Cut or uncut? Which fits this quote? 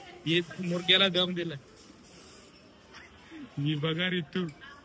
uncut